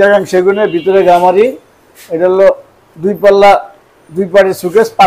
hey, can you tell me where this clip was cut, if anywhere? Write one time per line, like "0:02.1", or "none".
none

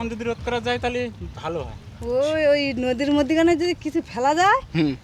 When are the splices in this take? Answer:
none

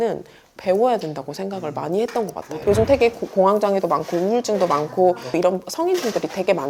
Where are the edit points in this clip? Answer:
0:02.4
0:05.3

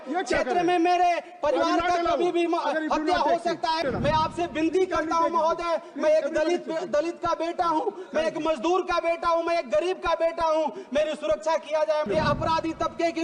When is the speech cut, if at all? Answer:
0:03.8
0:12.1

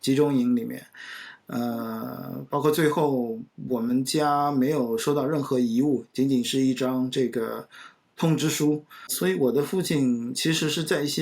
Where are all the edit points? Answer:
0:09.1

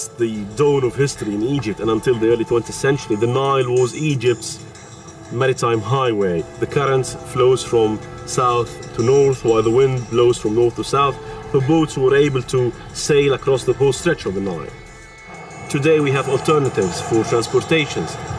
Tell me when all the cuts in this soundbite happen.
none

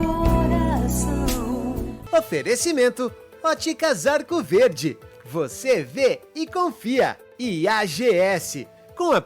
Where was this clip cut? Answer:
0:02.0

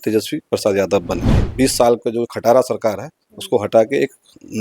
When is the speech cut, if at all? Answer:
0:01.4

